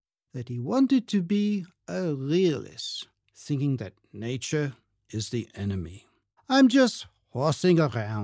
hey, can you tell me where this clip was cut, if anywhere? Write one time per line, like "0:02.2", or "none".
0:06.4